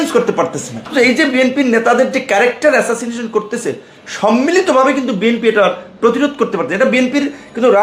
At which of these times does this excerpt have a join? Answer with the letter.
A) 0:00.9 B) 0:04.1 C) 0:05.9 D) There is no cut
A